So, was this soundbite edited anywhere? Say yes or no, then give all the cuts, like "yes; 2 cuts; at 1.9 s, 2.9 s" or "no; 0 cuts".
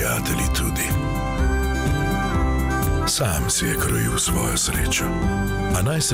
no; 0 cuts